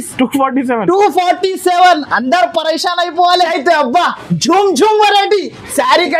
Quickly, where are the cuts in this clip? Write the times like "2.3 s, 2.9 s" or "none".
3.3 s